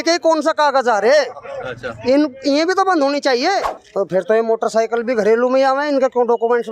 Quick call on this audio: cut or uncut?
cut